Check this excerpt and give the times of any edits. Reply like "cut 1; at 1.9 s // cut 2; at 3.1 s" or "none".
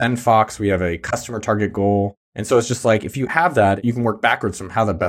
cut 1; at 3.8 s